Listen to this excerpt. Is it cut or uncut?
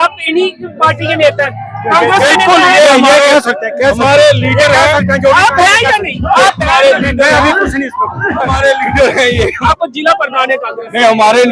cut